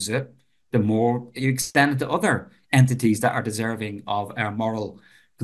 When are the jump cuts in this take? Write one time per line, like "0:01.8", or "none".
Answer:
0:01.4